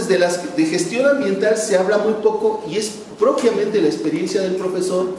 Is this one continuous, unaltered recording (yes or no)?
yes